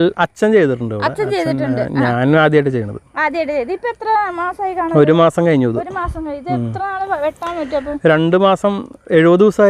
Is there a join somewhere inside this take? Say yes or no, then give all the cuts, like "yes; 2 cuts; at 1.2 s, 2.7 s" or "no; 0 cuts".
no; 0 cuts